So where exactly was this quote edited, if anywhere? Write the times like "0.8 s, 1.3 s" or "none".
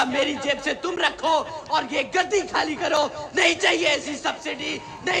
none